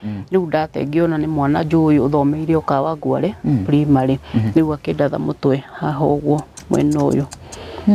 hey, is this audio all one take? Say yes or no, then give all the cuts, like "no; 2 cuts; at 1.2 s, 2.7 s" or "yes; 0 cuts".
yes; 0 cuts